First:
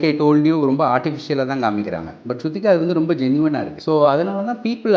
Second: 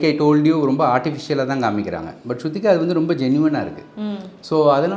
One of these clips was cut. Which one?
first; 1 cut; at 3.7 s

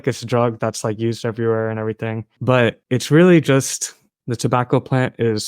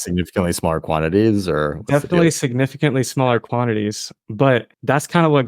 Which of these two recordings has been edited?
first; 1 cut; at 4.1 s

